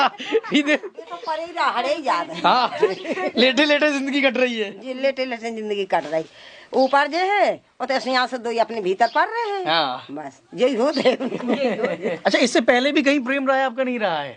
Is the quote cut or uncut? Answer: cut